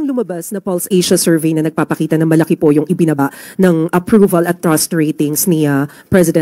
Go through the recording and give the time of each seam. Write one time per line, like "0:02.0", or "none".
none